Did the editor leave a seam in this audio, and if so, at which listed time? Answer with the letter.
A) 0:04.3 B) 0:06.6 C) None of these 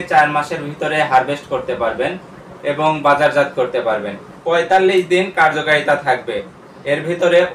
A